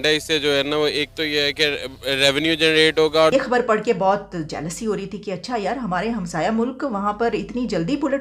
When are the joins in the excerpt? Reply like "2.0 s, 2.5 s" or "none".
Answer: 3.3 s